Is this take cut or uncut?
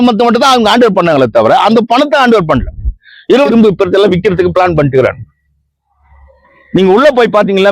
cut